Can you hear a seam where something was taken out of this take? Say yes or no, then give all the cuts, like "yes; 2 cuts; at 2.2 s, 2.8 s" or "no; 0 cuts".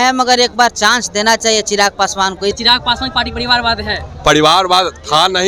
yes; 1 cut; at 2.6 s